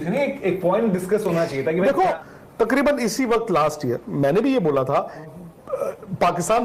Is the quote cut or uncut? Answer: cut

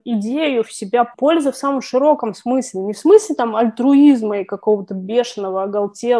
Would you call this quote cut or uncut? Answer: cut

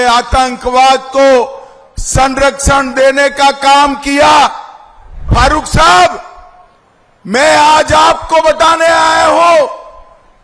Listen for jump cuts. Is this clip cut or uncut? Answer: cut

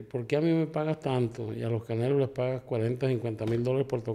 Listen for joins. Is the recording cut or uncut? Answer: uncut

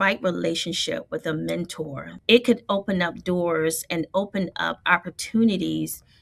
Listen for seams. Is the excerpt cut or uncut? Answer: cut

